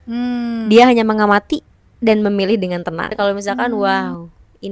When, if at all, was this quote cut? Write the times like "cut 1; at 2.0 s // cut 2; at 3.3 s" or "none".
cut 1; at 3.1 s